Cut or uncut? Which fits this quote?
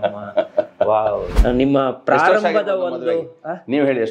cut